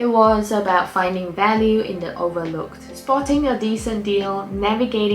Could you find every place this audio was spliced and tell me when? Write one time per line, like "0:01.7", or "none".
0:02.9